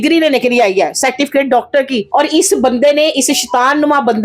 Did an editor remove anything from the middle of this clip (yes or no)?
yes